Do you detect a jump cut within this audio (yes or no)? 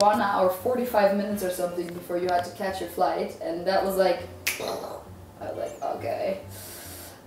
no